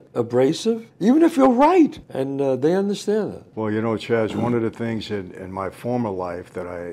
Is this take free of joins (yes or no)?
yes